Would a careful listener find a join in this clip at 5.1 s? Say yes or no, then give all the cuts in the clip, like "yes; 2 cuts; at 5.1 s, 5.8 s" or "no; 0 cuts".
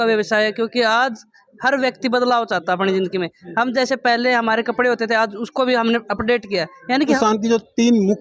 no; 1 cut; at 7.2 s